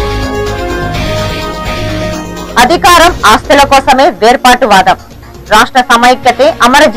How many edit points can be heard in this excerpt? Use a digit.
1